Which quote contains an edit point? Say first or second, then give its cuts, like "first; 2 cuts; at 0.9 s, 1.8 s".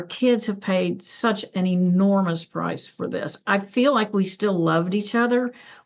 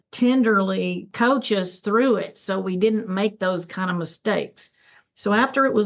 second; 1 cut; at 1.1 s